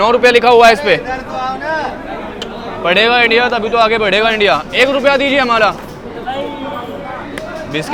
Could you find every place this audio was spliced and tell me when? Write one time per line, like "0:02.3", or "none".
none